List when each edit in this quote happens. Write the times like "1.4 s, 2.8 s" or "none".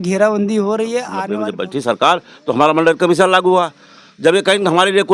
1.2 s

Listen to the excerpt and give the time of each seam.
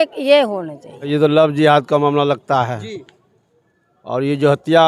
1.1 s

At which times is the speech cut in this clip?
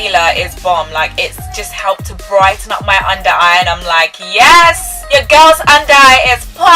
none

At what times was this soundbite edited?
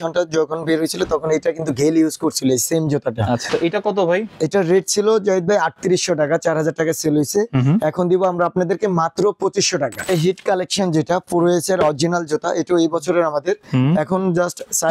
3.5 s, 10.0 s

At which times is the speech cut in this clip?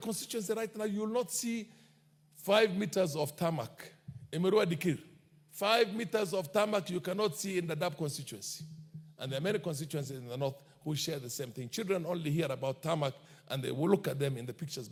none

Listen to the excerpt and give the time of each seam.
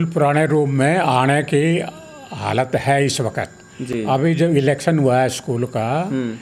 none

